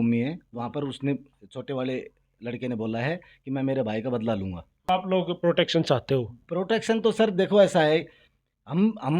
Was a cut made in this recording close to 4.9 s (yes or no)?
yes